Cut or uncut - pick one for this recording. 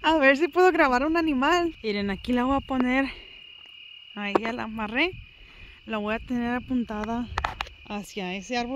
cut